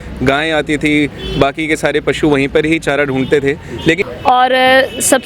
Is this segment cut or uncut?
cut